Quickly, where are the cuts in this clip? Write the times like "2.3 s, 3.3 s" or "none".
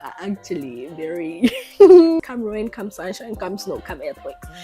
2.3 s